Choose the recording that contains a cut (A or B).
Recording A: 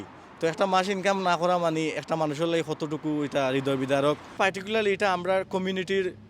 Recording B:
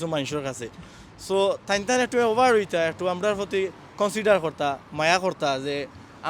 A